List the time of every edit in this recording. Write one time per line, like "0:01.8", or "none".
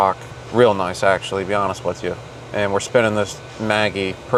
none